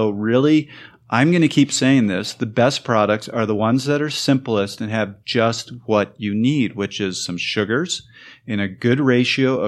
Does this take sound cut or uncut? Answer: uncut